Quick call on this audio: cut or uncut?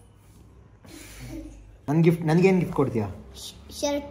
cut